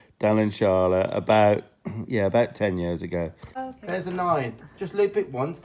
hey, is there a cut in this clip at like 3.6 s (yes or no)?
yes